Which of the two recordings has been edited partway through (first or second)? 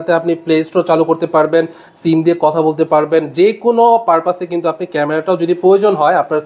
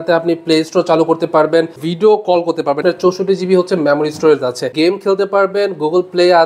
second